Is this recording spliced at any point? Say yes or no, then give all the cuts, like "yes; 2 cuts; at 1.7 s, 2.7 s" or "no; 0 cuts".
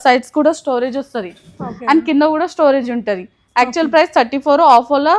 no; 0 cuts